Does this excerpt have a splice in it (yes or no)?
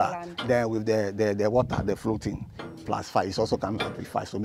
no